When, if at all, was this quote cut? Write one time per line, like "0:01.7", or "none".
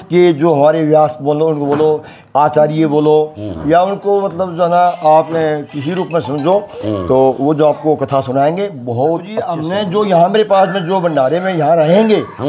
0:09.6